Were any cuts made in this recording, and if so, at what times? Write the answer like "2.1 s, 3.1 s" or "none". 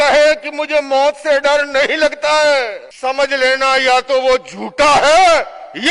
2.8 s